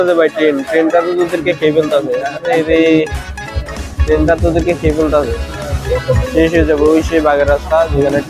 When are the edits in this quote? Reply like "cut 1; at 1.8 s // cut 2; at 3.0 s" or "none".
none